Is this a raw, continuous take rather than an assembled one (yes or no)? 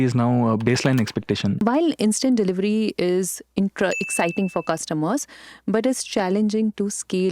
no